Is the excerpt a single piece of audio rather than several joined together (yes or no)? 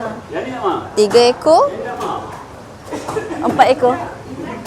yes